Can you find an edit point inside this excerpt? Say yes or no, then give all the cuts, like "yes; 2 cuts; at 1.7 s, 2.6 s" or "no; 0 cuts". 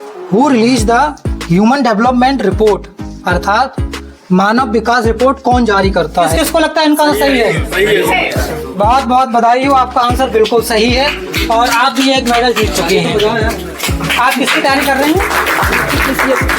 yes; 1 cut; at 6.3 s